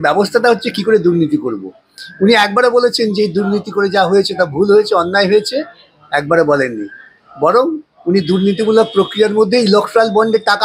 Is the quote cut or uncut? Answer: uncut